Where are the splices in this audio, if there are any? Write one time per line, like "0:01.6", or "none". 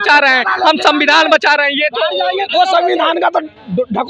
none